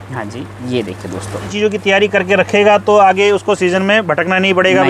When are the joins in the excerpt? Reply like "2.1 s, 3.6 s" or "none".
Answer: 1.5 s

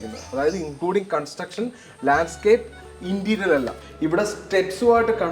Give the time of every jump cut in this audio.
3.8 s

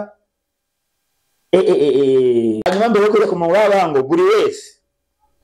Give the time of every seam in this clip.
2.7 s

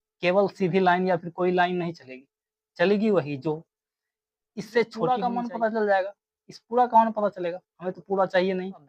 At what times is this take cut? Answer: 5.2 s

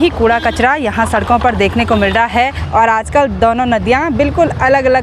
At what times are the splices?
2.6 s

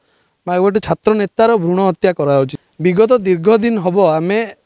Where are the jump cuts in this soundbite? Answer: 2.5 s

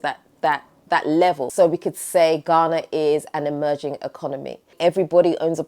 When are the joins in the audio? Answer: 1.5 s, 4.7 s

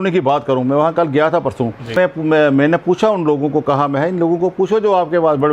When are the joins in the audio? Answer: 1.9 s

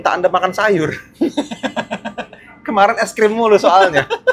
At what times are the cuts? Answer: none

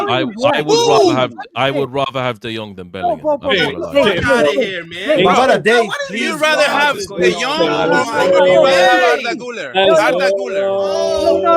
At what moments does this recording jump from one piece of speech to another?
none

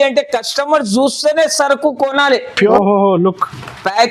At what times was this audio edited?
2.7 s

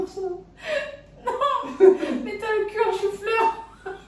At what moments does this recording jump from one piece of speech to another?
none

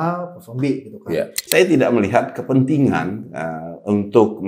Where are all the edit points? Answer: 1.4 s

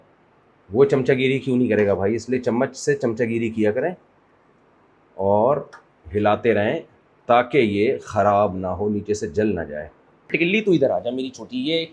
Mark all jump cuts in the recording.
10.3 s

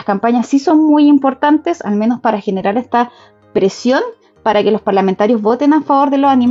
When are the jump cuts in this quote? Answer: none

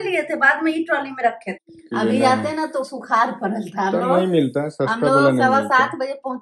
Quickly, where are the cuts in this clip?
1.6 s

